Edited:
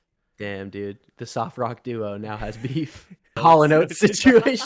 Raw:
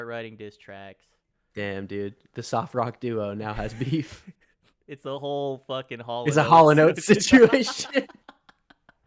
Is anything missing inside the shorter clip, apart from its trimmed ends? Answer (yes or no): yes